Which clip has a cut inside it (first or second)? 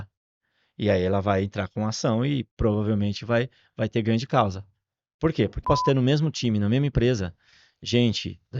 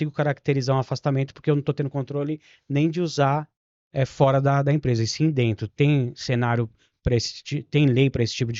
first